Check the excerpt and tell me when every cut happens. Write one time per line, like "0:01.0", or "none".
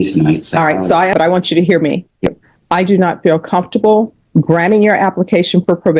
0:01.1
0:02.3